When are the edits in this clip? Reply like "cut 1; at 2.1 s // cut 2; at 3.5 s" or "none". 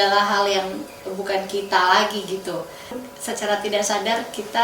cut 1; at 3.0 s